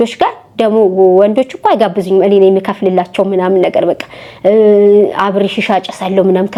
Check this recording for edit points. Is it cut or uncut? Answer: uncut